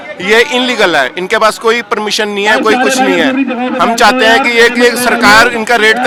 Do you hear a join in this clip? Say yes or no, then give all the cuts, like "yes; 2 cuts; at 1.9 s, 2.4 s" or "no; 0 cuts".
no; 0 cuts